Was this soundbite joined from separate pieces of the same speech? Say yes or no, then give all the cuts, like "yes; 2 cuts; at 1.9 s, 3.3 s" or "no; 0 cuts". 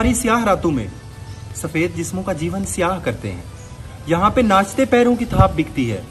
no; 0 cuts